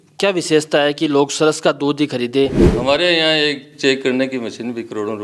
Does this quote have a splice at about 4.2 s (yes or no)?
no